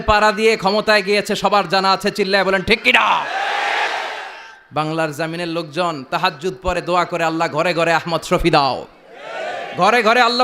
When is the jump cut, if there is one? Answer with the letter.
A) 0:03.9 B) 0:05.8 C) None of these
C